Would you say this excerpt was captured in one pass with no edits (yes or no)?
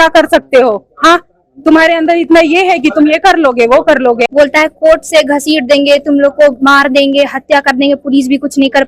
no